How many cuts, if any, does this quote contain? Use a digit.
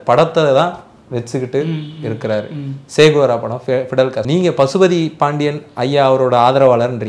1